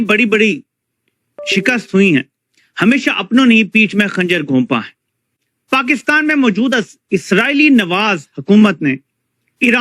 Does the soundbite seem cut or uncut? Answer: uncut